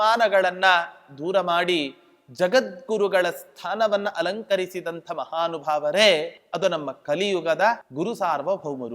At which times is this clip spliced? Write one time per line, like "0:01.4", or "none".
0:06.4
0:07.9